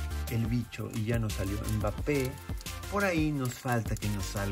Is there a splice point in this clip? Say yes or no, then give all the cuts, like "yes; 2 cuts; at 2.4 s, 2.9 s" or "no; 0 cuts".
no; 0 cuts